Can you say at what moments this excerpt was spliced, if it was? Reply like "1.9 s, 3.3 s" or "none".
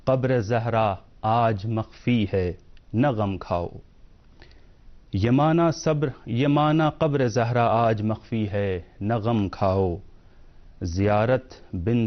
none